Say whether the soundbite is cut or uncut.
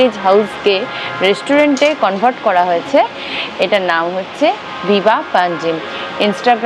uncut